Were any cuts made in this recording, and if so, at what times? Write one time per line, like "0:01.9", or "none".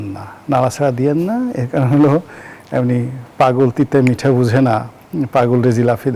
none